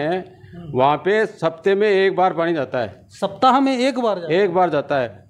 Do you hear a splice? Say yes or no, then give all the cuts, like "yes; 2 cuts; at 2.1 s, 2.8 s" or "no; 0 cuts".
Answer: no; 0 cuts